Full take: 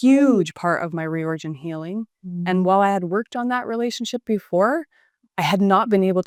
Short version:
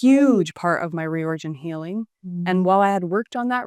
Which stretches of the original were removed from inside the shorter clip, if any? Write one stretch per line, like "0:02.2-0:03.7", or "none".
none